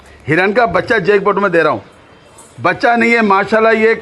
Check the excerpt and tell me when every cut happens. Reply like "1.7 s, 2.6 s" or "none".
none